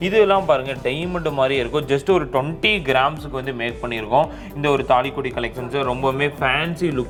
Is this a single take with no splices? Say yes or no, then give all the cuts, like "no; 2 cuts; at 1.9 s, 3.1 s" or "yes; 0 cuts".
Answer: yes; 0 cuts